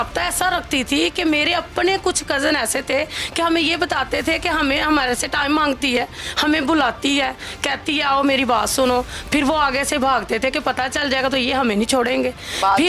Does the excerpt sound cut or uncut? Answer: uncut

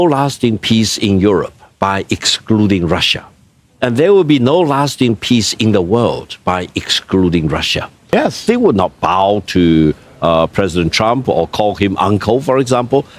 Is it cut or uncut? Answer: cut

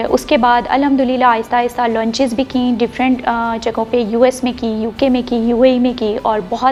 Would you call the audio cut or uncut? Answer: uncut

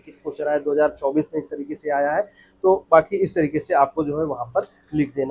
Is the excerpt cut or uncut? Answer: uncut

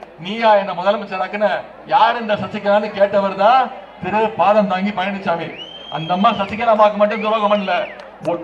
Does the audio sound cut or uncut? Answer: uncut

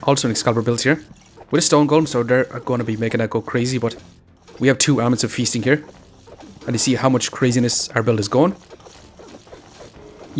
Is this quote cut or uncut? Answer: cut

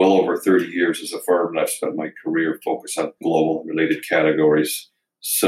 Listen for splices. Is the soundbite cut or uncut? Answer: cut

